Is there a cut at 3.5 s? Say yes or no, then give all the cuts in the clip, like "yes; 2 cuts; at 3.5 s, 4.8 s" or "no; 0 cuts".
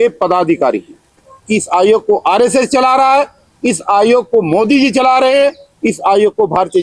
no; 1 cut; at 1.3 s